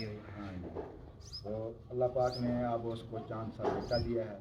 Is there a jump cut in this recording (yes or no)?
no